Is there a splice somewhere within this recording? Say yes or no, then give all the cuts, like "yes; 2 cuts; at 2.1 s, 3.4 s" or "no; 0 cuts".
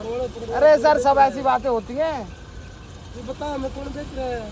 no; 0 cuts